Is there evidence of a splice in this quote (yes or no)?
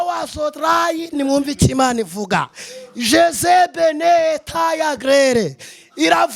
no